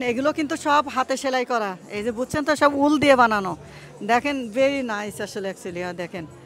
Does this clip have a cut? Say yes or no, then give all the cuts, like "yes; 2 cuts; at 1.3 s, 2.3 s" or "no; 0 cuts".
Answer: no; 0 cuts